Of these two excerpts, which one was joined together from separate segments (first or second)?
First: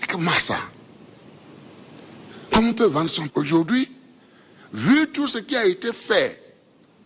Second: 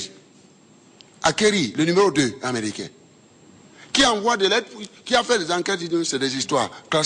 first